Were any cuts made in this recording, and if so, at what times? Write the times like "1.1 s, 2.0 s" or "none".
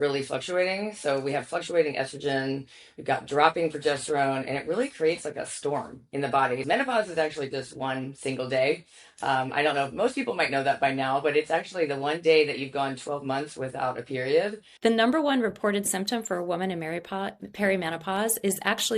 6.6 s, 14.6 s